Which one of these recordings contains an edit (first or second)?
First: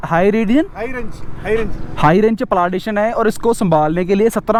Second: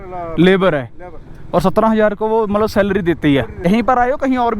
second